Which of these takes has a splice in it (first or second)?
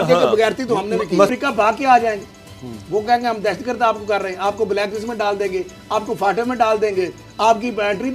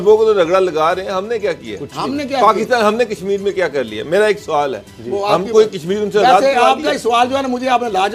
first